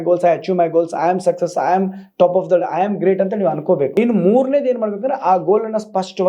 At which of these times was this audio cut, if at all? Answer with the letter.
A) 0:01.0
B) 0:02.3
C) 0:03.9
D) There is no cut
C